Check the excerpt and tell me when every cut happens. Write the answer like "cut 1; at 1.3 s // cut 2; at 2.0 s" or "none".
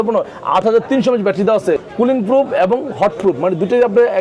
cut 1; at 1.9 s